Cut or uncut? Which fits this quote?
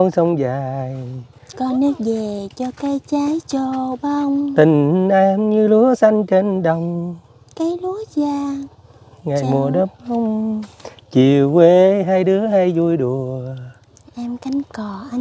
uncut